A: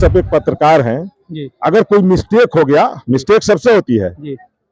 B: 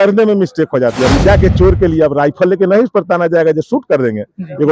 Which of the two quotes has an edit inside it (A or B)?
B